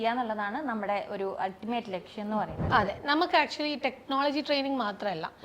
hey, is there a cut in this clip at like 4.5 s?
no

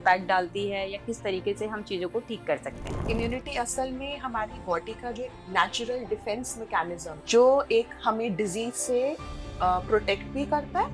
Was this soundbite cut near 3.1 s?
yes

